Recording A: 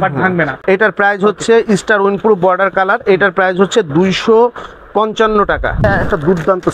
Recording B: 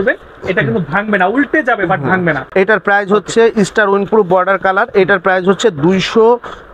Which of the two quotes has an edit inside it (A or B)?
A